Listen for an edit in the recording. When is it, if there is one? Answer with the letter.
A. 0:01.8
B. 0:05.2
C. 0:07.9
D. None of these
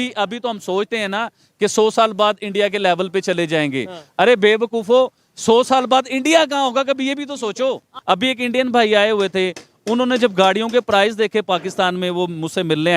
C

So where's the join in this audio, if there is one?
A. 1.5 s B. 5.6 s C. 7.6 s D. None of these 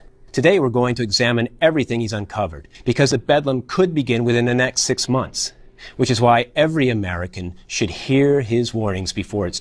B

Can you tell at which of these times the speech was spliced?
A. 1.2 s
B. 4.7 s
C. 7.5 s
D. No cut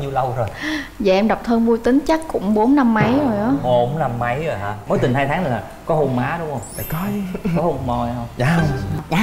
B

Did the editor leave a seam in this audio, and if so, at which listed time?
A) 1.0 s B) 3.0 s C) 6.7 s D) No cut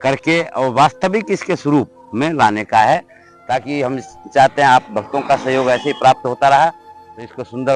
D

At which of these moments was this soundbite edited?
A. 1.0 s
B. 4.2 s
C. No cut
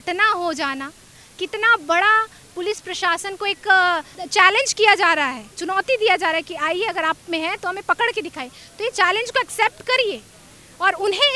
B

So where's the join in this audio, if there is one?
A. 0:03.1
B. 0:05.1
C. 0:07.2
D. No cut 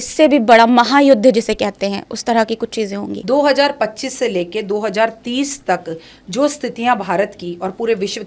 A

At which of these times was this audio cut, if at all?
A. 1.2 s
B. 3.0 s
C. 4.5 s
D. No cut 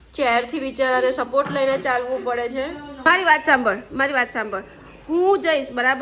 B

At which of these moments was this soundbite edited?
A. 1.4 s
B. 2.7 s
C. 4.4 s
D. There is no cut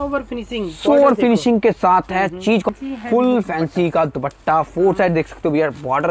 B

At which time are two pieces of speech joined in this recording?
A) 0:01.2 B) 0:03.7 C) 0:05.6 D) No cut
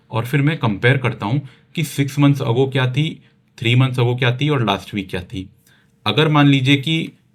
D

